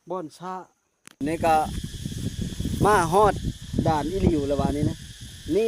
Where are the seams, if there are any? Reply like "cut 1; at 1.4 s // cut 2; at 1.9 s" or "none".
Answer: cut 1; at 1.1 s